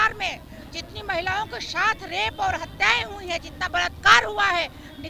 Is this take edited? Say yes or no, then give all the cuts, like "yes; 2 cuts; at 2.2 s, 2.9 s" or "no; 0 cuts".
no; 0 cuts